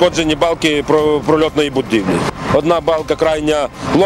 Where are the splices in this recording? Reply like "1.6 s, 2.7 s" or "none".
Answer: 2.3 s